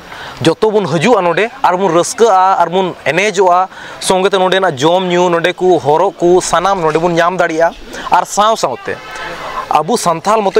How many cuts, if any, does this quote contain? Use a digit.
0